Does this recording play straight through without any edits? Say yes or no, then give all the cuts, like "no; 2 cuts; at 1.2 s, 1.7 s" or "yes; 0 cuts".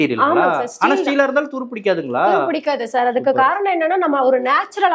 yes; 0 cuts